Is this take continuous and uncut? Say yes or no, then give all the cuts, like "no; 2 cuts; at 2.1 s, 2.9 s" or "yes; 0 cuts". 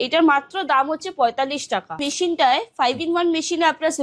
no; 1 cut; at 2.1 s